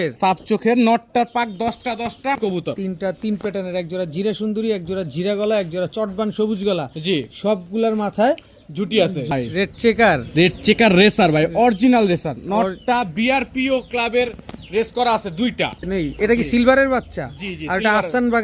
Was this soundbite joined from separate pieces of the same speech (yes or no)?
yes